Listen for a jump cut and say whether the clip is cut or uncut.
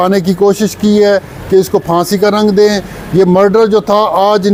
uncut